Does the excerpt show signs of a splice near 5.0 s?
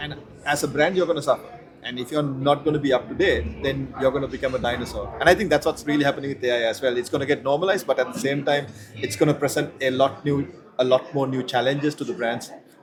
no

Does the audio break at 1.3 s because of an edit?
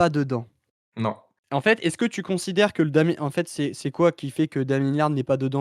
yes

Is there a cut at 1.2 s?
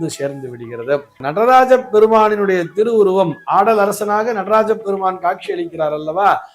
yes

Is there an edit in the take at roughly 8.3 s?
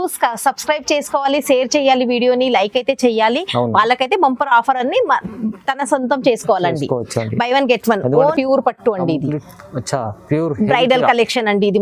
yes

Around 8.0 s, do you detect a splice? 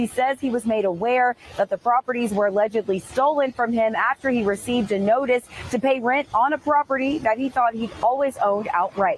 no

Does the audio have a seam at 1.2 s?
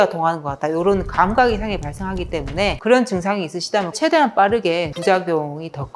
no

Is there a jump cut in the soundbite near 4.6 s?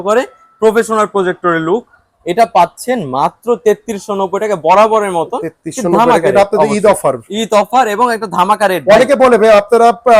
no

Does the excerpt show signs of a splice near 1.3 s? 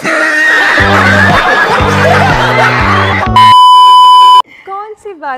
no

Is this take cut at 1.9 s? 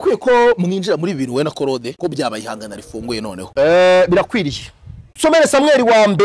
yes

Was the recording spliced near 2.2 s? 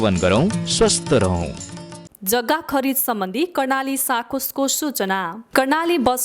yes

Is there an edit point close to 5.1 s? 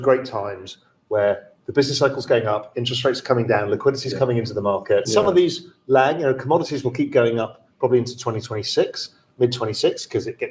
yes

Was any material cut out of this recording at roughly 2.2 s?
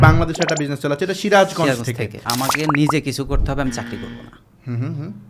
yes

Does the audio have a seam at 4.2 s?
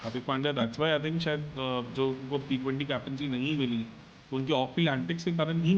no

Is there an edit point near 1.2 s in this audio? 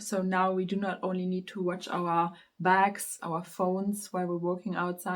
no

